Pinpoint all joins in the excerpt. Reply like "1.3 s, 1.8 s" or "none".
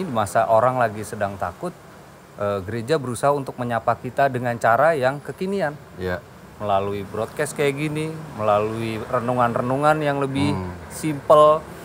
none